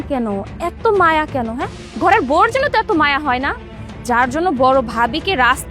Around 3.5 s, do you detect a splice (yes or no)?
no